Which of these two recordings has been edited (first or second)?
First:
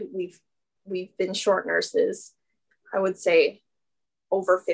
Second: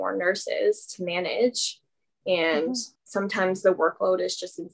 second